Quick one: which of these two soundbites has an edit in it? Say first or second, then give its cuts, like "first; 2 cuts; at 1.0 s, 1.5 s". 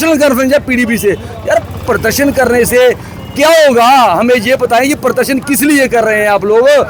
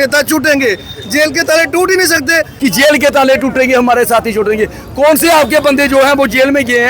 second; 1 cut; at 2.5 s